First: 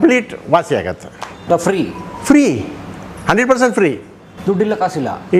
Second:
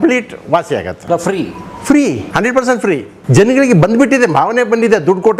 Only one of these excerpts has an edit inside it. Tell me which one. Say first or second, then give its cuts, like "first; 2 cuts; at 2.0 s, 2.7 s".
second; 3 cuts; at 0.9 s, 2.2 s, 3.1 s